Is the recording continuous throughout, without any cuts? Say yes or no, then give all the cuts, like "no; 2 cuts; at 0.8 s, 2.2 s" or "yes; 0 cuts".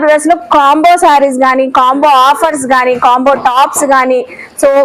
yes; 0 cuts